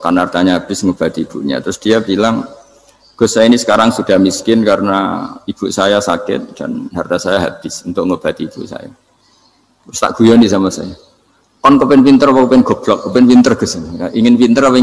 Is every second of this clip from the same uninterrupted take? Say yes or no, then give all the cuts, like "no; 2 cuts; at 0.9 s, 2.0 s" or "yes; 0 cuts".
yes; 0 cuts